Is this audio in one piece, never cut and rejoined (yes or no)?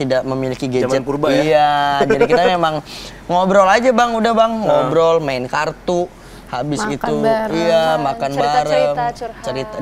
yes